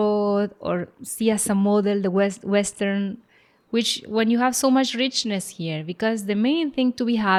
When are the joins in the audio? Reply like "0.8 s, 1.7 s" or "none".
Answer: none